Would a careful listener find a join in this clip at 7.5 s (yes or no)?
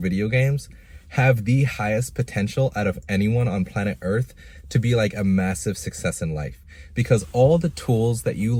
no